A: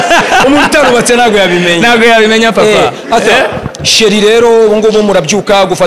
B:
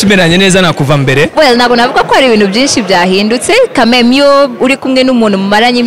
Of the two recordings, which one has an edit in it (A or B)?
B